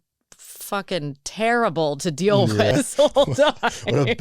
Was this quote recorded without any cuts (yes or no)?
no